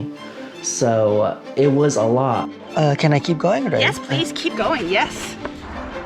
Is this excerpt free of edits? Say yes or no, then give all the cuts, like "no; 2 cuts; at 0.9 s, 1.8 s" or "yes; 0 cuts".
yes; 0 cuts